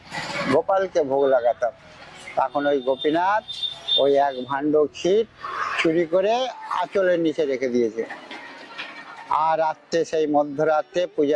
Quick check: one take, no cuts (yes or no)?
yes